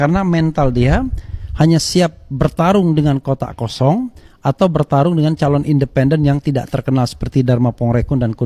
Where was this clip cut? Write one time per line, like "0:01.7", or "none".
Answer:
none